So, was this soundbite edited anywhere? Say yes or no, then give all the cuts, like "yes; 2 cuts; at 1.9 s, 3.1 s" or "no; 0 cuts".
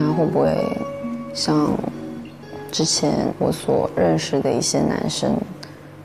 no; 0 cuts